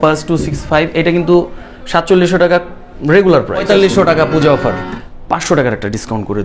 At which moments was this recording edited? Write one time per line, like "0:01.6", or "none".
0:03.6
0:04.9

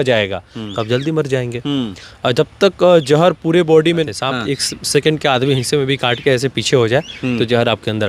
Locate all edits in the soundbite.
0:04.1

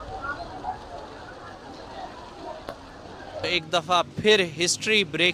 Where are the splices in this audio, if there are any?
0:03.5

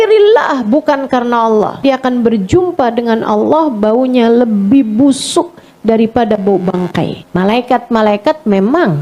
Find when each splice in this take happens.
0:01.8
0:07.2

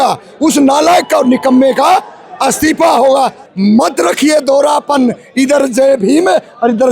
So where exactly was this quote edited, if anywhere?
0:03.4

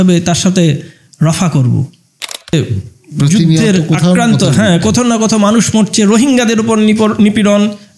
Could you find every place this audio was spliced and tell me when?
0:02.5

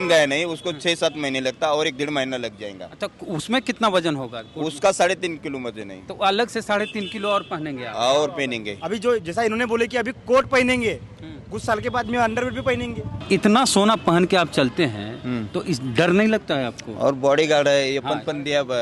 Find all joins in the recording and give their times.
0:08.7
0:13.1

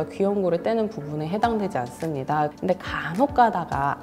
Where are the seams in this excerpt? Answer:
0:02.5

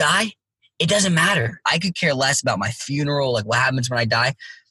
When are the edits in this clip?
0:01.6

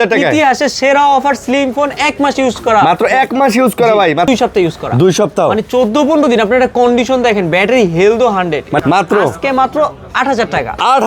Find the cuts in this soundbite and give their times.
0:04.3
0:08.8

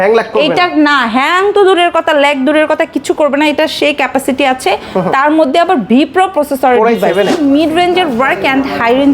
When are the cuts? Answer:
0:07.4

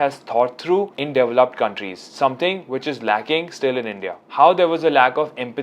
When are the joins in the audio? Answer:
0:04.2

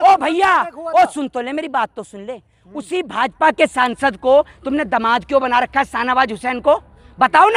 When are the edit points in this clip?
none

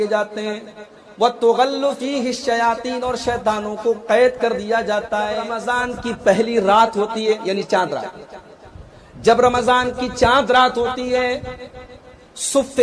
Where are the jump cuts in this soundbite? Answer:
0:05.6

